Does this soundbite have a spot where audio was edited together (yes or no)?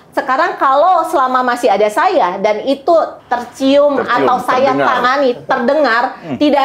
yes